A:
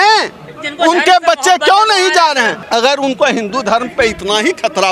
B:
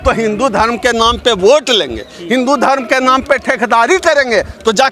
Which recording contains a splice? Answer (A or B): A